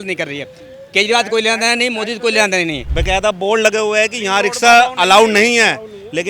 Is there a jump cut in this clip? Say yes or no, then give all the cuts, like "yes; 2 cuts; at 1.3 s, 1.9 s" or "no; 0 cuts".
yes; 1 cut; at 2.9 s